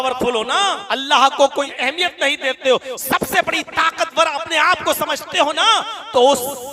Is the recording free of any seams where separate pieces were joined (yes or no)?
no